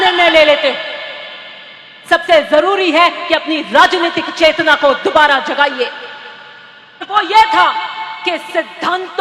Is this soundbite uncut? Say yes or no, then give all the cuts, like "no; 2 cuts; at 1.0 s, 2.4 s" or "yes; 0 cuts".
no; 1 cut; at 7.1 s